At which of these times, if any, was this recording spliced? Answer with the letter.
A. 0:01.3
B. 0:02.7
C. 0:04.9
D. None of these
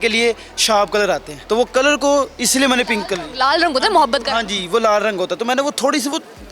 A